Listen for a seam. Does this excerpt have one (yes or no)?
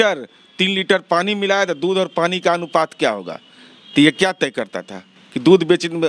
no